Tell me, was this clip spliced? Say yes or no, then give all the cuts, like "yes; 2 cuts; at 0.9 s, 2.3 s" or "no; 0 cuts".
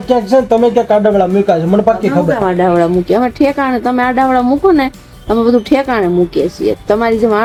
no; 0 cuts